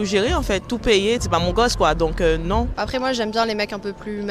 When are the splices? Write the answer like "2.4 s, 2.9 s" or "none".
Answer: 1.1 s, 2.7 s